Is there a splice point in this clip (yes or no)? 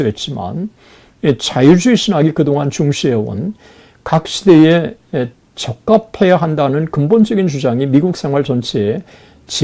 no